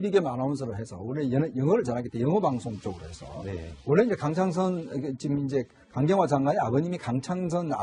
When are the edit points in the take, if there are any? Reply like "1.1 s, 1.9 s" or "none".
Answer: none